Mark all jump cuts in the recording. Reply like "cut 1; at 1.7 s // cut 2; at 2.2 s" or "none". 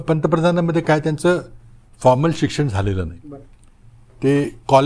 none